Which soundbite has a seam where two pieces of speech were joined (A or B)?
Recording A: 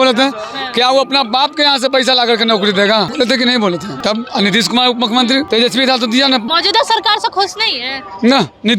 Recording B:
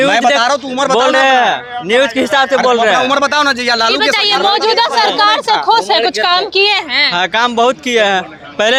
A